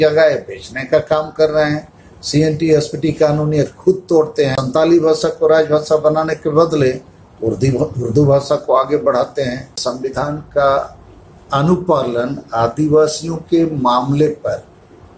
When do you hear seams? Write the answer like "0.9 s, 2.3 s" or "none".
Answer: 4.5 s, 9.9 s